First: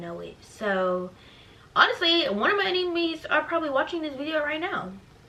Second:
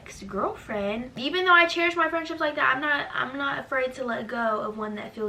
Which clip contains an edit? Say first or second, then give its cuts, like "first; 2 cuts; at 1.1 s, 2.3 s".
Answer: second; 1 cut; at 1.1 s